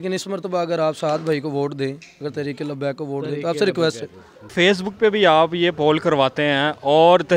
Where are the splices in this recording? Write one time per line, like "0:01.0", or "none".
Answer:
0:04.5